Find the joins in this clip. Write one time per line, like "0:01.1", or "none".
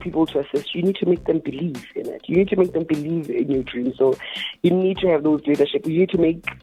none